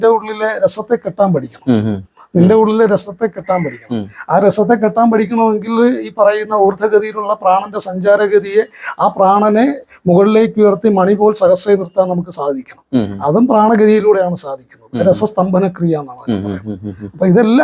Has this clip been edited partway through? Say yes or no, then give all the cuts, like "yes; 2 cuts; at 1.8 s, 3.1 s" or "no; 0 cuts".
no; 0 cuts